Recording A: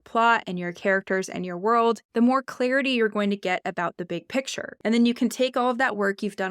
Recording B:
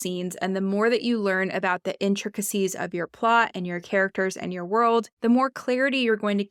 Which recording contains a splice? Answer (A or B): A